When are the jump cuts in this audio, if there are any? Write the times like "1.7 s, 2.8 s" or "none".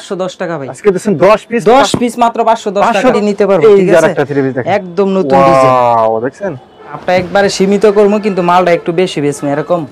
3.1 s, 7.0 s